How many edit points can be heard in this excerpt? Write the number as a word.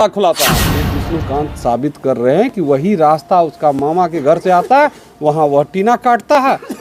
one